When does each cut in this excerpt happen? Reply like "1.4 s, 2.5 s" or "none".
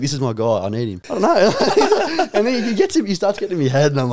1.0 s